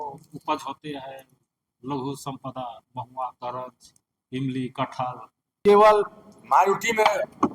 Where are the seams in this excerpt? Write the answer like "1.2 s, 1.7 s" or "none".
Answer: 5.6 s